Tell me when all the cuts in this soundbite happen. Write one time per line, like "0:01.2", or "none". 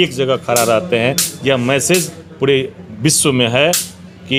none